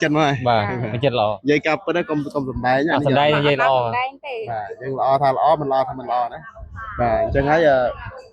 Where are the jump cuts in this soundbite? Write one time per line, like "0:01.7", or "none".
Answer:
none